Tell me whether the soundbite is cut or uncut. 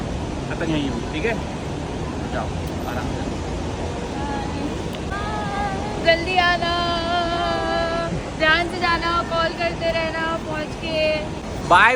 uncut